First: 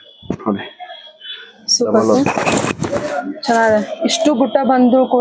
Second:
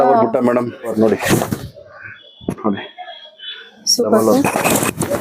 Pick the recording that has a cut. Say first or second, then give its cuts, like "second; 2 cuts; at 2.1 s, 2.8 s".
second; 1 cut; at 0.9 s